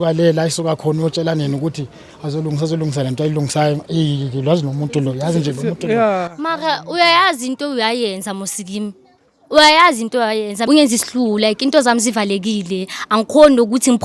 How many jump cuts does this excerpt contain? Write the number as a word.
one